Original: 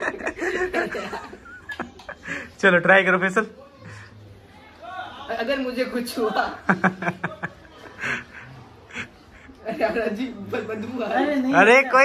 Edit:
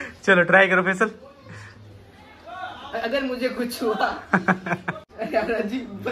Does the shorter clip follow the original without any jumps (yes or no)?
no